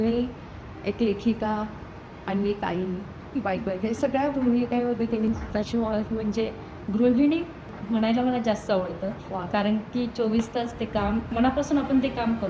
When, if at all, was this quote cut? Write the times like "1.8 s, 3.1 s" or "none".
5.3 s, 7.7 s, 11.3 s